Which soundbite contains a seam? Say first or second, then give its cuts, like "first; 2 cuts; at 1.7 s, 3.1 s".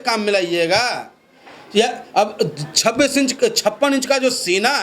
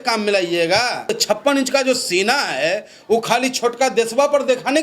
second; 1 cut; at 1.2 s